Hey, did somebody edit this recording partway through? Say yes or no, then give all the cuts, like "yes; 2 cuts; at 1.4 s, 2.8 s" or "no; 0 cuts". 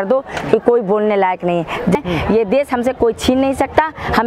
yes; 1 cut; at 2.0 s